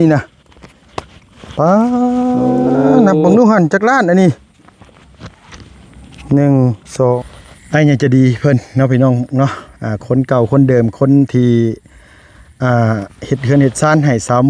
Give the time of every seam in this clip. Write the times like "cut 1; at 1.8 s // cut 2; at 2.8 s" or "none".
cut 1; at 7.2 s